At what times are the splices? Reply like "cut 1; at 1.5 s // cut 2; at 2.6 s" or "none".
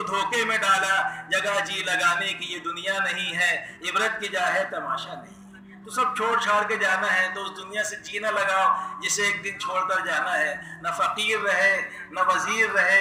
none